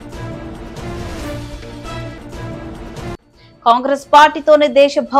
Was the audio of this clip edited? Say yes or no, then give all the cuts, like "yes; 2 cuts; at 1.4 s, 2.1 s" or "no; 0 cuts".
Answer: no; 0 cuts